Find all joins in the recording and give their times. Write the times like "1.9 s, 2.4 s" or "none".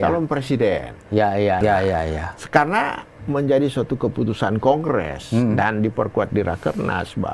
1.6 s